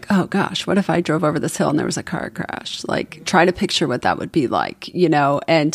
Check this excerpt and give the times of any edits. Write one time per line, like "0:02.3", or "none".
none